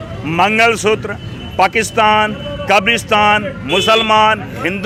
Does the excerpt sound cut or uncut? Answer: uncut